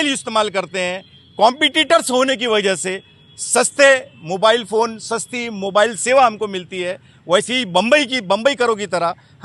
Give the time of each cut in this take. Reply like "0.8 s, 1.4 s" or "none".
none